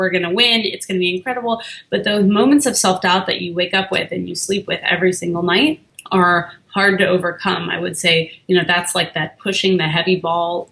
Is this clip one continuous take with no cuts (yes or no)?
no